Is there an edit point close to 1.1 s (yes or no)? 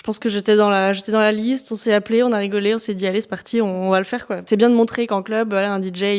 no